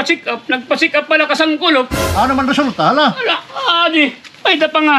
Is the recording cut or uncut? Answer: uncut